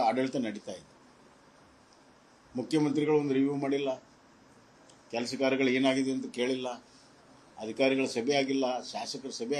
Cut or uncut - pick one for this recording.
uncut